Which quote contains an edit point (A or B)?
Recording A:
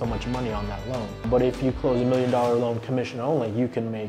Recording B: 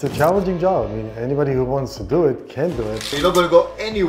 B